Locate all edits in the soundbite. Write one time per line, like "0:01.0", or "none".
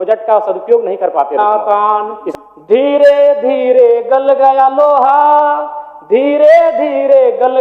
0:01.4